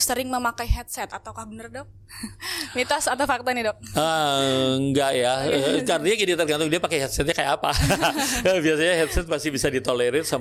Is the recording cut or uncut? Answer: uncut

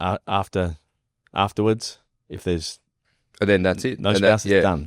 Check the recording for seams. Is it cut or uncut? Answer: uncut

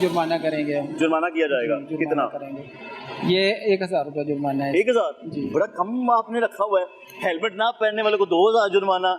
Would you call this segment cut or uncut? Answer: uncut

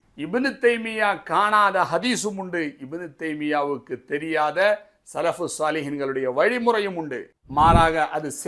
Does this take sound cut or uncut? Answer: cut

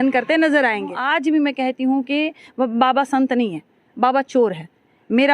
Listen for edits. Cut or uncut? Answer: cut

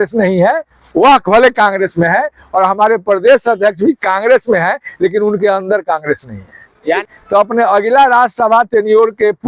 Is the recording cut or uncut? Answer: cut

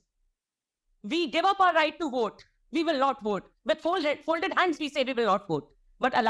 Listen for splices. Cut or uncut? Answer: uncut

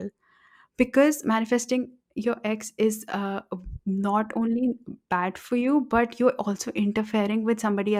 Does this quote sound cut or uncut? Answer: uncut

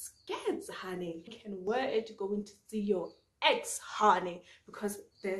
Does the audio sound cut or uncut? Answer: cut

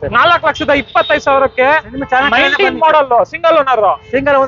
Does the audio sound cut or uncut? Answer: uncut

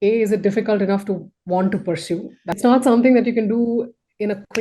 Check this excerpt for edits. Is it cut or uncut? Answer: cut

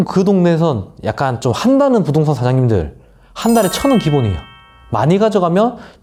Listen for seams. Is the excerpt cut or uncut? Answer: uncut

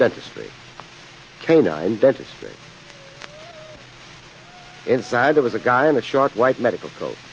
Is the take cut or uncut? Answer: uncut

